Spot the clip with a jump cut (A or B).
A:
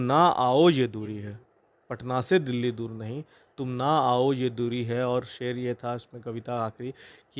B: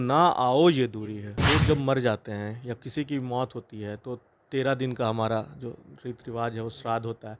B